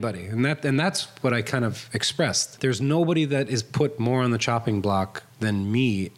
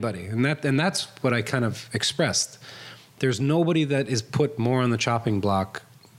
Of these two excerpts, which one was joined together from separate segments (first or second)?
first